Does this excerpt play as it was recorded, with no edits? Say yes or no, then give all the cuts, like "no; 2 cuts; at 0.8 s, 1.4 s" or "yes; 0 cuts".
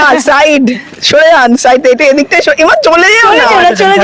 yes; 0 cuts